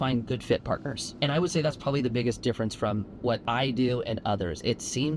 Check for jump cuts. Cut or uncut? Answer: cut